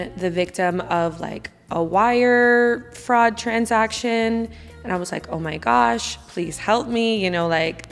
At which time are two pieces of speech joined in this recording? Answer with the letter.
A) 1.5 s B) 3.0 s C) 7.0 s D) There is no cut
D